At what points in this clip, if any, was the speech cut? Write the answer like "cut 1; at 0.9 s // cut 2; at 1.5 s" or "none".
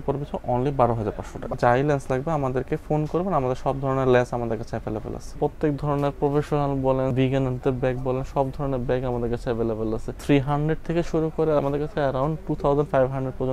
cut 1; at 1.6 s // cut 2; at 5.3 s // cut 3; at 7.1 s // cut 4; at 10.1 s // cut 5; at 11.6 s